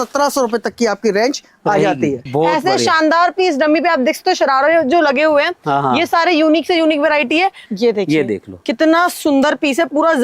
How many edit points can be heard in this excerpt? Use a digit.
2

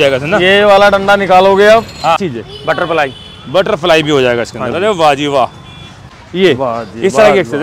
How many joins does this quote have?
2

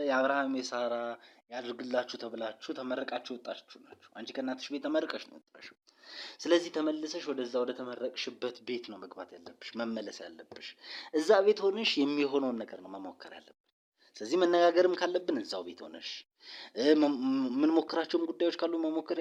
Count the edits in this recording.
0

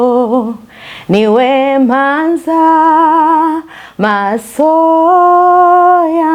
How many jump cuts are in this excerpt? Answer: 0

